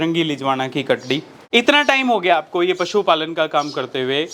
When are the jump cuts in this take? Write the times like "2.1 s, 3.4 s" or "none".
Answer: 1.3 s